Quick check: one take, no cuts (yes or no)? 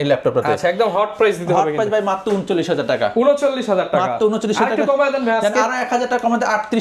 yes